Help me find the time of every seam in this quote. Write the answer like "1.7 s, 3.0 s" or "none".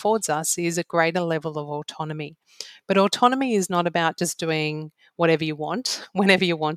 none